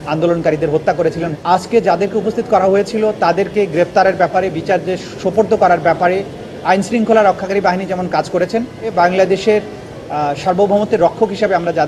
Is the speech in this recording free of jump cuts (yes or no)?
no